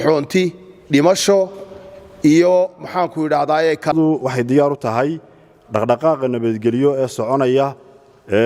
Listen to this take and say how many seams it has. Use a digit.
1